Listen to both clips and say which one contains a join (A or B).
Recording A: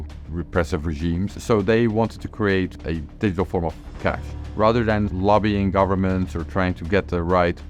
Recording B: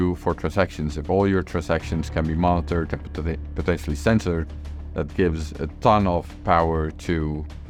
A